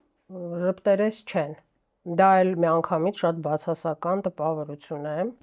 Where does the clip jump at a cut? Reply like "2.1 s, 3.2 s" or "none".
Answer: none